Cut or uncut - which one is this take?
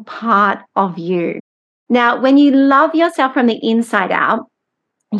uncut